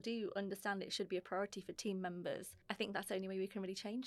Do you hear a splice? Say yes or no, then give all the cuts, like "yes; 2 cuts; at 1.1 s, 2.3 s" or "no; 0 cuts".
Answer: yes; 1 cut; at 2.5 s